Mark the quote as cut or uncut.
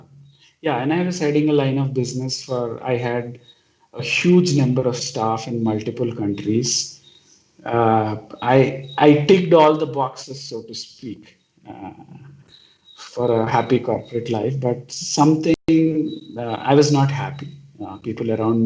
uncut